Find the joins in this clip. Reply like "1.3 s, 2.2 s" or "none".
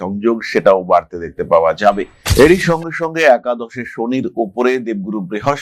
2.3 s